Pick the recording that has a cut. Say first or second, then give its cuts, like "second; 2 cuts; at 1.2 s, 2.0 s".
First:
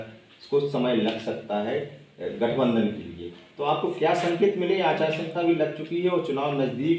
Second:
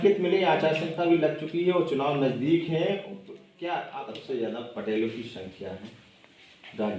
second; 1 cut; at 4.0 s